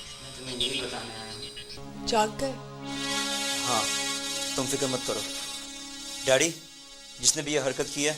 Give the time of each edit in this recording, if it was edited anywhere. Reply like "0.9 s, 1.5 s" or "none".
1.8 s